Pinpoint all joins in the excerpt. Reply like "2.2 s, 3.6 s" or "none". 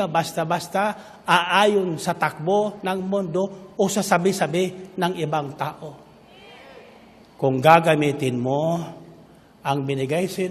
none